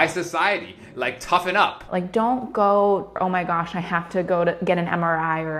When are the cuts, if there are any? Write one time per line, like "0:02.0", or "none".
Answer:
0:01.8
0:03.2